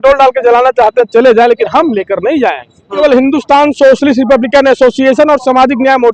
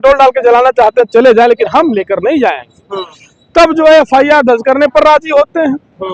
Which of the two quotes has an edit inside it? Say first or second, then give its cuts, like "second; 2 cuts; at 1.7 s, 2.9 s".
first; 1 cut; at 2.9 s